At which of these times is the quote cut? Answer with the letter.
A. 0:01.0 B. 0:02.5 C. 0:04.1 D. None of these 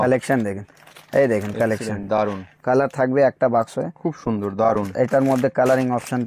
B